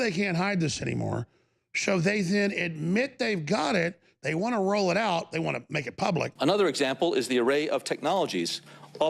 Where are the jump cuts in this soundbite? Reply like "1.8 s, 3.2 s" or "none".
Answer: 6.3 s